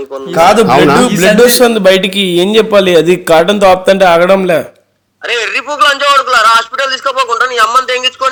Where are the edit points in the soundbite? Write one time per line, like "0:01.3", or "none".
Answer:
none